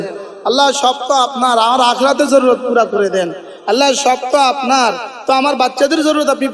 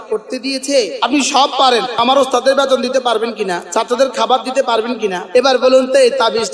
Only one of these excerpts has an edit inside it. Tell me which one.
second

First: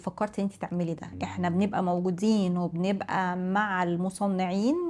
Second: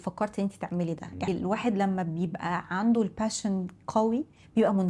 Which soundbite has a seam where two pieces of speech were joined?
second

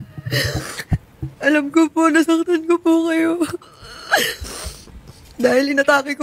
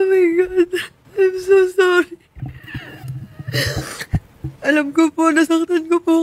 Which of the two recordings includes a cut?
second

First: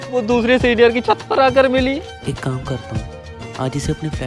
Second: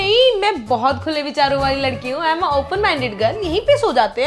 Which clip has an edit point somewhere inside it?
first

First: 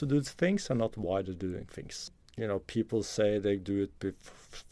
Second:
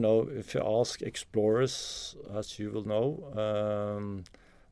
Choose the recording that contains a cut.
first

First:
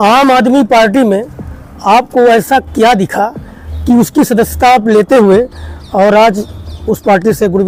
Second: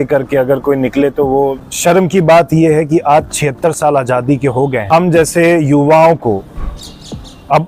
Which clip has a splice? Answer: second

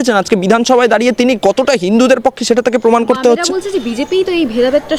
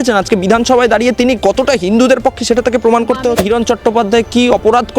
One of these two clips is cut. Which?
second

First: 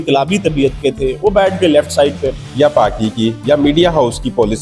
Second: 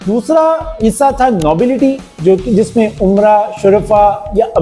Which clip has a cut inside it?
first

